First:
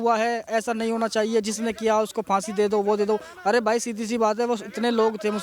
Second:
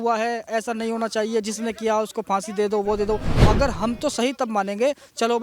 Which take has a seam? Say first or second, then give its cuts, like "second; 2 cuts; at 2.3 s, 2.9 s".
second; 1 cut; at 3.3 s